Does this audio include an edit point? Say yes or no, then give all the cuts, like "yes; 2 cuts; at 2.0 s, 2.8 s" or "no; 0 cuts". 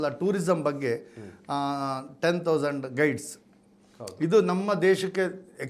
no; 0 cuts